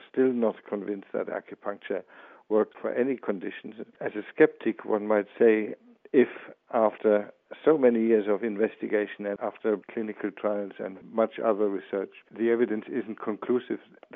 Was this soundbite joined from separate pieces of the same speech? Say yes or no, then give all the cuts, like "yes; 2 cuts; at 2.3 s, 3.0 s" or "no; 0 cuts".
yes; 2 cuts; at 3.9 s, 9.8 s